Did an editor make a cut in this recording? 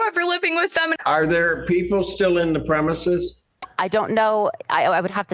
yes; 1 cut; at 0.9 s

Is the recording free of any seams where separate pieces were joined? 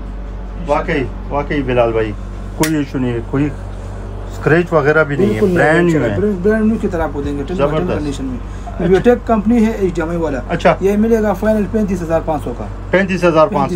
yes; 0 cuts

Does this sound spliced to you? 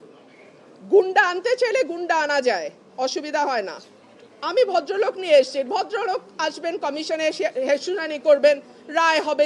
no; 0 cuts

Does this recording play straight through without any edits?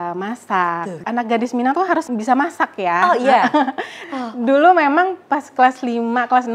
no; 3 cuts; at 1.0 s, 2.1 s, 4.1 s

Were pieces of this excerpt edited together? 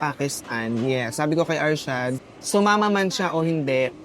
yes; 1 cut; at 2.3 s

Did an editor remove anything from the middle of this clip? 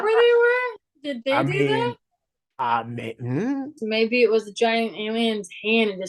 yes; 1 cut; at 3.8 s

